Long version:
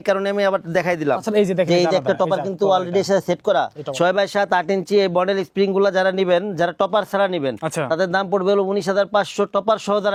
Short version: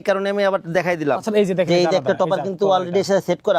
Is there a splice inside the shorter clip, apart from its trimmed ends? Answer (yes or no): no